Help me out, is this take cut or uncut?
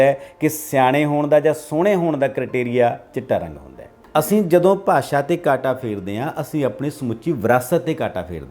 cut